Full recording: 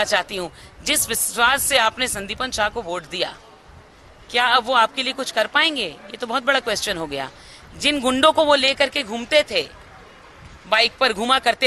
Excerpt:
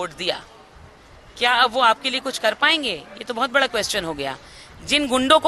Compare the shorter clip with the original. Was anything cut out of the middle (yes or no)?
no